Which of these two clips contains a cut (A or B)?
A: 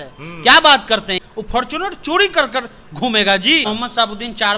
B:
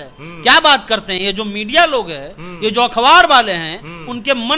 A